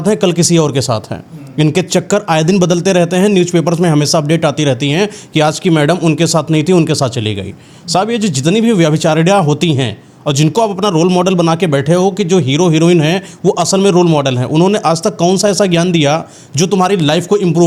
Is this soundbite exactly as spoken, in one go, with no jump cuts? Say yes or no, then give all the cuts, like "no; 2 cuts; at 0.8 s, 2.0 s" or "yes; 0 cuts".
yes; 0 cuts